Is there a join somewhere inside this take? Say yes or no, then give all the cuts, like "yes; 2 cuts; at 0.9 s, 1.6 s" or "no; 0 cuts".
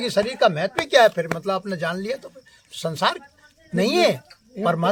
no; 0 cuts